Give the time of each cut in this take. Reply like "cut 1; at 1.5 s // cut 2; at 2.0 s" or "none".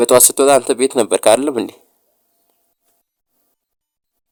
none

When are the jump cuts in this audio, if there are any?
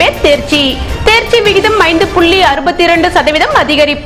none

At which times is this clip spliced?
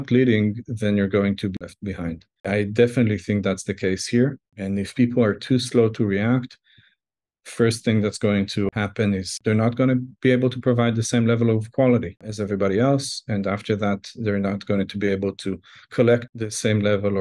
none

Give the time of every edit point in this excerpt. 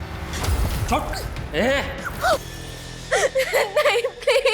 cut 1; at 2.0 s

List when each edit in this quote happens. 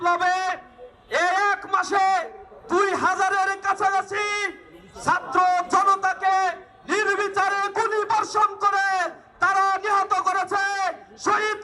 none

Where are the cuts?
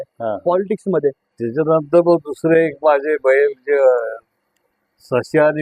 cut 1; at 1.3 s

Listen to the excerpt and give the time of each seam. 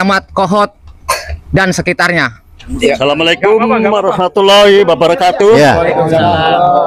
none

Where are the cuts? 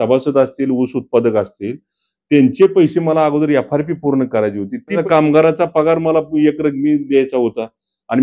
cut 1; at 5.0 s

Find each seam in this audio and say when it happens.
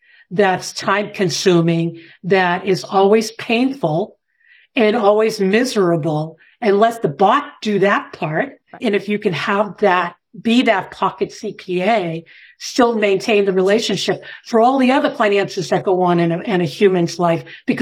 cut 1; at 8.8 s

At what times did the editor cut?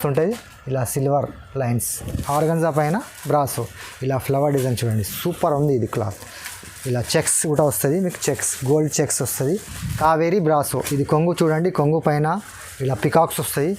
cut 1; at 2.1 s // cut 2; at 9.8 s

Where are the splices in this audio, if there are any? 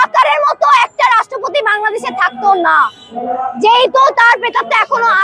none

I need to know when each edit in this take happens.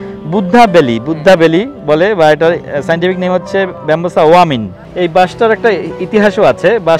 cut 1; at 4.8 s

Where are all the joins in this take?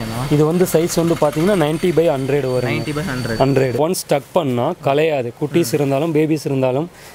cut 1; at 3.8 s

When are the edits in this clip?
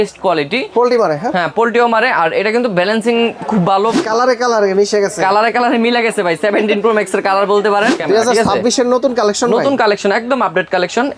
cut 1; at 4.0 s // cut 2; at 8.0 s

